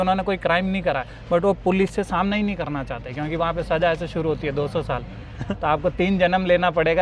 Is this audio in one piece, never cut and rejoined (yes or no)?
yes